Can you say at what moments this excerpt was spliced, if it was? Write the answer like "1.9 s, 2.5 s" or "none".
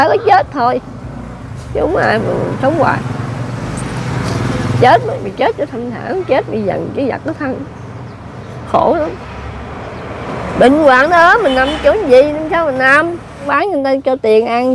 13.5 s

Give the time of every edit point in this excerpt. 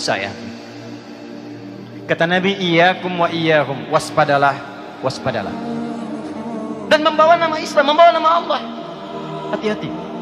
5.6 s, 6.9 s

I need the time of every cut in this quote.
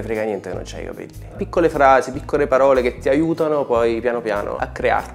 1.4 s

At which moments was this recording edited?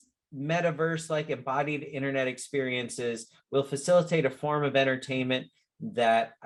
none

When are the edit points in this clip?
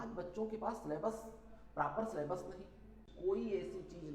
3.0 s

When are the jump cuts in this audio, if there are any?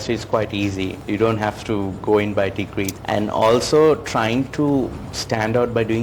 1.0 s, 2.9 s

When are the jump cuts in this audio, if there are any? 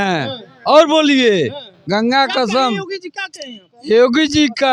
none

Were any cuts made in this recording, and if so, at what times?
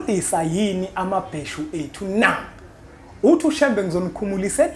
none

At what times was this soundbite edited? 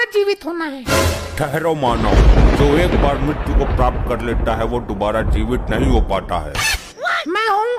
none

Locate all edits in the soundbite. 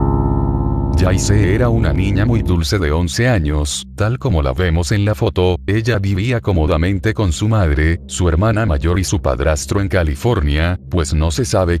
6.4 s

